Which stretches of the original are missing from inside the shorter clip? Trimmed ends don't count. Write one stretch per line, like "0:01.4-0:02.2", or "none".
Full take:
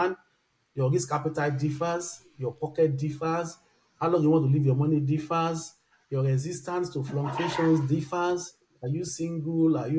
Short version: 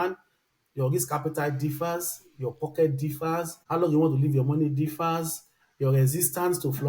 0:03.6-0:03.9